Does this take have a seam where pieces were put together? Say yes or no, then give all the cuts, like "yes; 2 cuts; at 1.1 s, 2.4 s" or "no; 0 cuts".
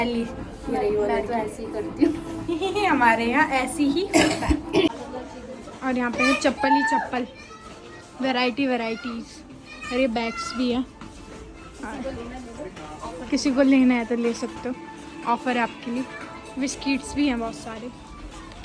no; 0 cuts